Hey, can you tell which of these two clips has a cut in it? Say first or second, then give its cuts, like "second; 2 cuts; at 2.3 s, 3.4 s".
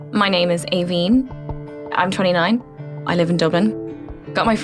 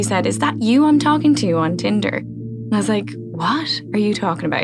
first; 3 cuts; at 1.3 s, 2.7 s, 3.8 s